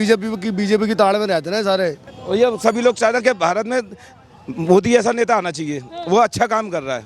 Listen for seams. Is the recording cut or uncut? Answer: cut